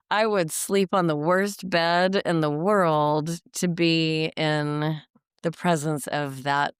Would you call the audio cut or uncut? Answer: uncut